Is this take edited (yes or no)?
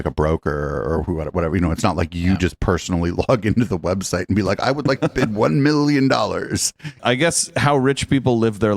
yes